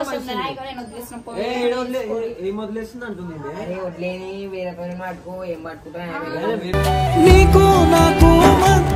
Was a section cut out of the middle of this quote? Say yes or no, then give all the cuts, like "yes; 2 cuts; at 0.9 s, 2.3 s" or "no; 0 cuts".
no; 0 cuts